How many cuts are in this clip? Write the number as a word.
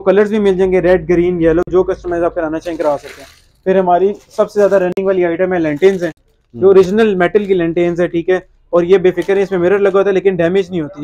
zero